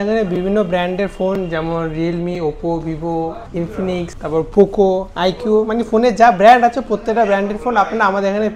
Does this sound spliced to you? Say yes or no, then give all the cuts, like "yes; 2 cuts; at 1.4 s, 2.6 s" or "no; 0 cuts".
no; 0 cuts